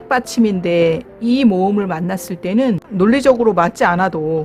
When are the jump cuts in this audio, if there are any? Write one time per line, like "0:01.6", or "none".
0:02.9